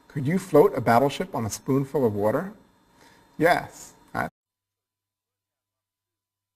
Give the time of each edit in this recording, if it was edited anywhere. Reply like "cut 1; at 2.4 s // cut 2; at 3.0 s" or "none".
none